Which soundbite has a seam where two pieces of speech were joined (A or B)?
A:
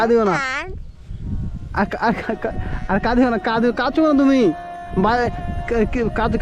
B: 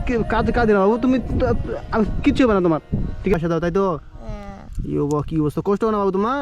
B